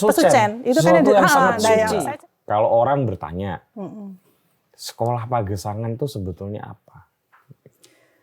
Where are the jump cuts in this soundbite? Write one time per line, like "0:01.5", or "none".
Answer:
0:02.0